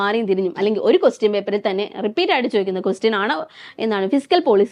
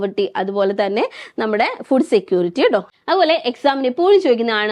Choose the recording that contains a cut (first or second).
second